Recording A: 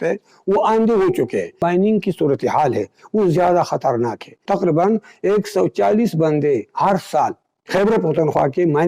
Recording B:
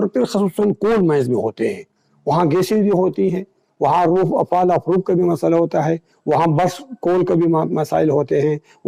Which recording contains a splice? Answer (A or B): A